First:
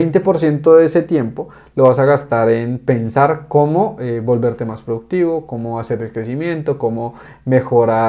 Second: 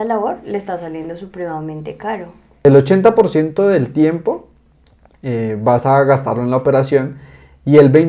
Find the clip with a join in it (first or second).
second